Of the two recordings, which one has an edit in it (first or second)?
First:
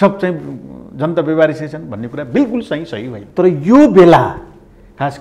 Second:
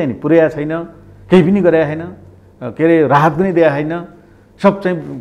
first